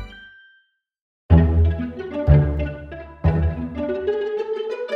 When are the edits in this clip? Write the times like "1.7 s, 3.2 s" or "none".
1.2 s